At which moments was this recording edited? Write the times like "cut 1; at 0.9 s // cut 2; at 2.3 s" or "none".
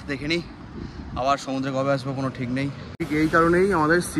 cut 1; at 3.0 s